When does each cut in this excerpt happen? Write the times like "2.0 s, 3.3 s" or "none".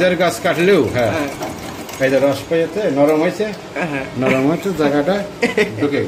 none